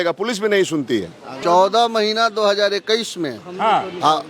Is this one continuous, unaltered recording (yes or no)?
no